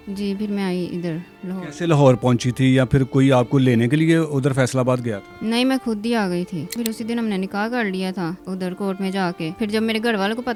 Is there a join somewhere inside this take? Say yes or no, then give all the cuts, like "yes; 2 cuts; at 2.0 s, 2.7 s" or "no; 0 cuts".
no; 0 cuts